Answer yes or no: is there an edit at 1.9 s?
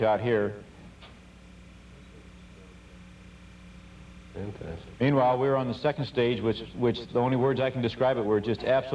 yes